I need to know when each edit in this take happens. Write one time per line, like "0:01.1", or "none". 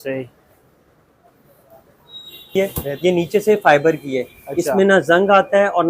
0:02.5